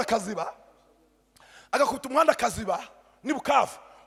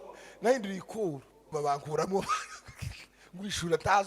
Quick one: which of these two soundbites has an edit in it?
second; 1 cut; at 1.5 s

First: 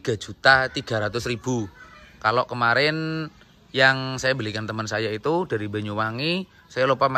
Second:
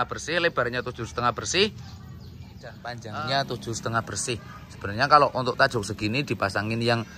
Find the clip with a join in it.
second; 1 cut; at 2.9 s

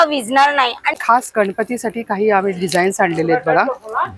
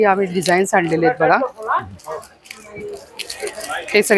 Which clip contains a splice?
first; 1 cut; at 1.0 s

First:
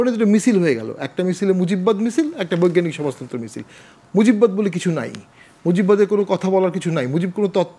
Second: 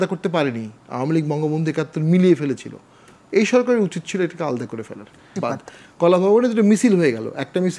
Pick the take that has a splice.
second; 1 cut; at 5.4 s

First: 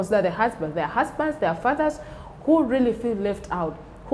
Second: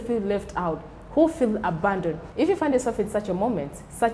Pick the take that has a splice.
second; 1 cut; at 2.2 s

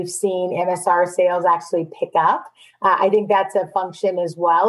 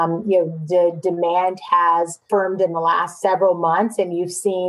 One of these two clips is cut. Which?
second; 2 cuts; at 2.2 s, 3.1 s

